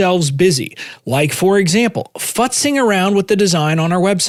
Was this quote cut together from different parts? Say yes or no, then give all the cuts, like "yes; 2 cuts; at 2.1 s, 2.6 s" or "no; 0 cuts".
no; 0 cuts